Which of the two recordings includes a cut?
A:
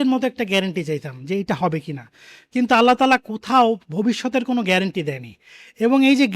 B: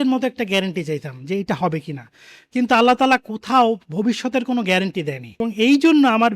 B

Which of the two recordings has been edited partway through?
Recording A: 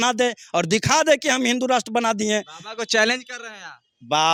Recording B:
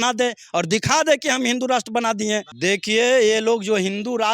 B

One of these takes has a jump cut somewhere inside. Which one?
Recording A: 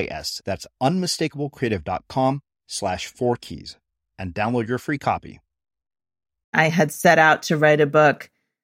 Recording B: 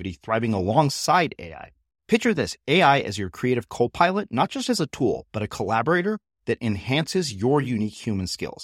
A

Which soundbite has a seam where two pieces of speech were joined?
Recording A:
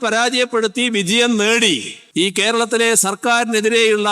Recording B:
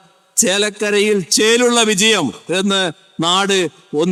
A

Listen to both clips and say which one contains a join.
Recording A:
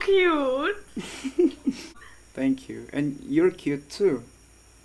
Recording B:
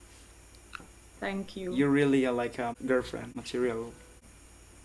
A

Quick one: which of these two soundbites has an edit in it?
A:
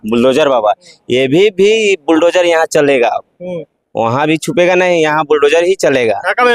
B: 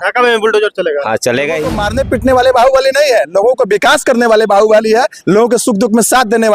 B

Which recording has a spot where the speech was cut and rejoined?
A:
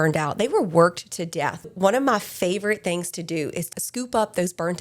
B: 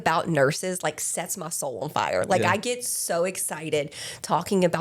A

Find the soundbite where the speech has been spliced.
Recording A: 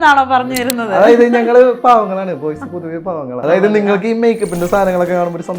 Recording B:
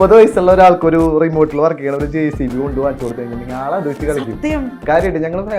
A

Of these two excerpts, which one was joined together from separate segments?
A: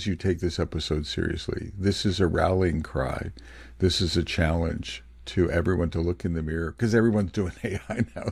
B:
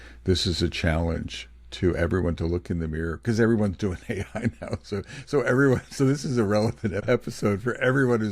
B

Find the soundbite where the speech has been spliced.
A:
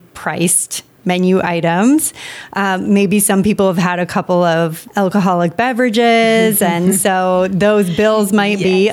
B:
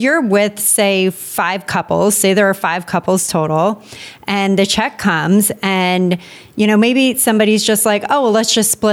A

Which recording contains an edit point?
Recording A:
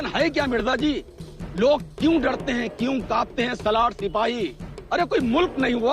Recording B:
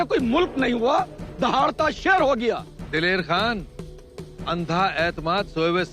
B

